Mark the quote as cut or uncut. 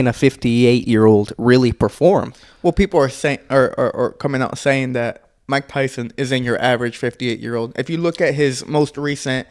uncut